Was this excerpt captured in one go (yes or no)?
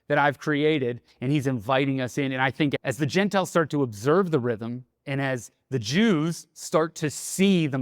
no